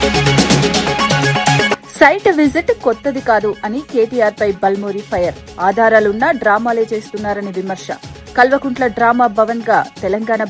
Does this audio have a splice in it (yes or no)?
yes